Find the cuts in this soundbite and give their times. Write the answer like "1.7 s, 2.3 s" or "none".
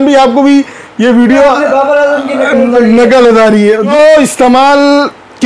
3.9 s